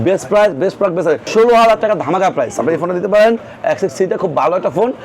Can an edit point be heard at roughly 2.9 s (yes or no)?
no